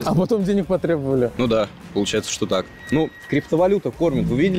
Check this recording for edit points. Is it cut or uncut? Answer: cut